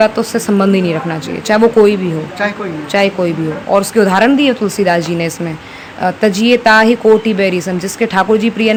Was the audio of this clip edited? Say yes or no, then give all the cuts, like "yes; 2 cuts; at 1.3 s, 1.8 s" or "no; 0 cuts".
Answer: no; 0 cuts